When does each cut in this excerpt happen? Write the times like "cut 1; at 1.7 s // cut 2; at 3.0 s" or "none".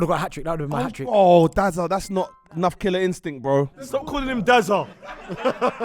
cut 1; at 3.7 s